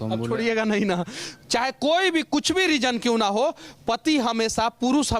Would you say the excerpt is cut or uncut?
cut